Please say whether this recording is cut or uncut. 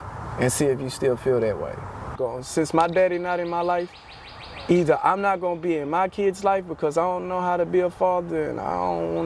cut